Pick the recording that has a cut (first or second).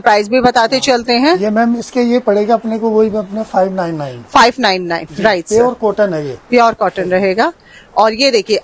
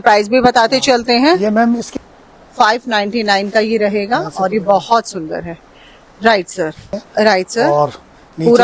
second